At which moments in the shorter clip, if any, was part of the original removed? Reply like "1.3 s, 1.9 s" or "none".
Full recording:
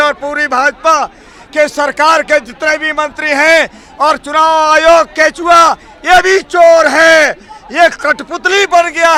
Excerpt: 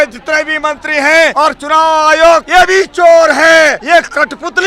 1.3 s, 2.5 s, 3.8 s